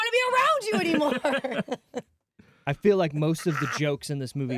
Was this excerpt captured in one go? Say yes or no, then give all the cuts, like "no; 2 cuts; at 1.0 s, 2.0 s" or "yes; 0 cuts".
yes; 0 cuts